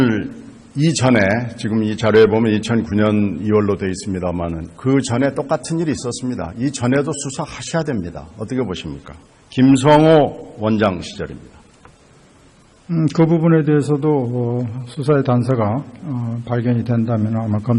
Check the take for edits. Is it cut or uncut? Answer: cut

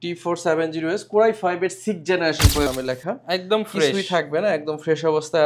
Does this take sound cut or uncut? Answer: cut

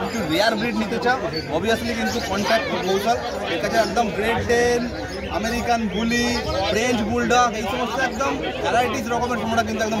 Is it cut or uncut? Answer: uncut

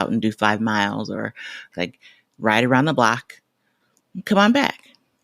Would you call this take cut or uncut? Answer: cut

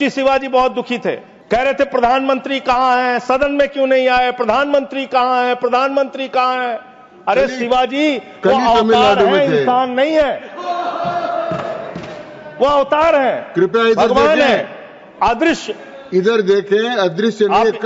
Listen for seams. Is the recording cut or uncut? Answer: cut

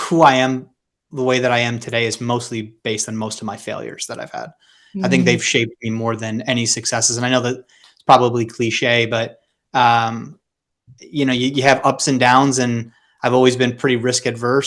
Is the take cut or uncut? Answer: uncut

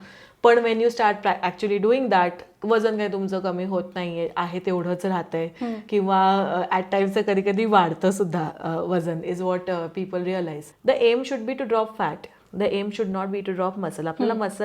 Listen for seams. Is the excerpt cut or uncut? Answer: cut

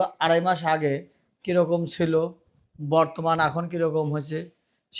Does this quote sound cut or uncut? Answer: uncut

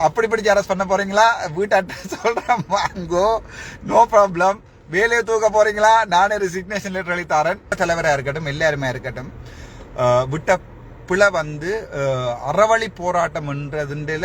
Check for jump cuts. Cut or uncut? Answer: cut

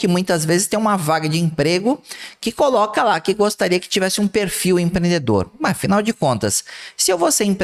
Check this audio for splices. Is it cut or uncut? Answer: uncut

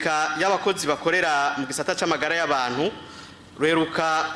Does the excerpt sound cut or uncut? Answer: uncut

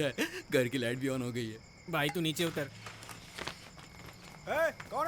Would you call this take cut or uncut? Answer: uncut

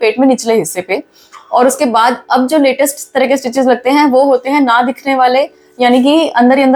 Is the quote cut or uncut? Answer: uncut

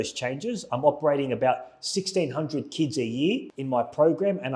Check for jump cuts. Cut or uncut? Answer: cut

